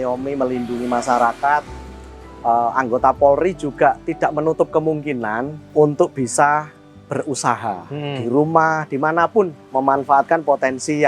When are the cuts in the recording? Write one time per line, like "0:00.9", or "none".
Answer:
none